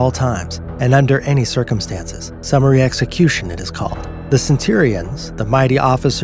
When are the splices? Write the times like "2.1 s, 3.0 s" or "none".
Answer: none